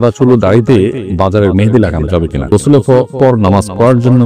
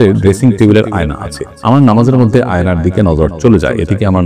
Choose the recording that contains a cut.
first; 2 cuts; at 1.0 s, 2.5 s

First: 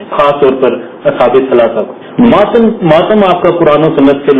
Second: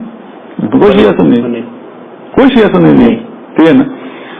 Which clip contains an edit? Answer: first; 1 cut; at 2.3 s

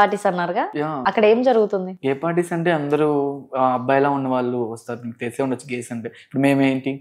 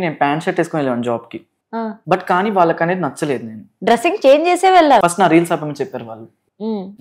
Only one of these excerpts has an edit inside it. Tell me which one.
second; 3 cuts; at 1.9 s, 3.6 s, 5.0 s

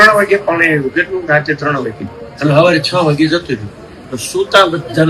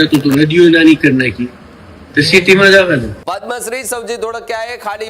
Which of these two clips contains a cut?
second; 1 cut; at 3.2 s

